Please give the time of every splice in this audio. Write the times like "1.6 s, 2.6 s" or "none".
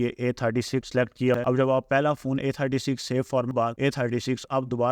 1.3 s, 3.5 s